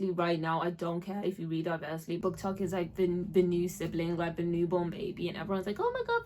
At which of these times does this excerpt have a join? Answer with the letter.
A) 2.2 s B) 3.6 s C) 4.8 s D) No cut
A